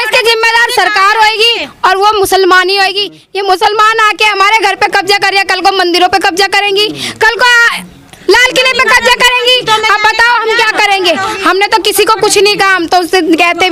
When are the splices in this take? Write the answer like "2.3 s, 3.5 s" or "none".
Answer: none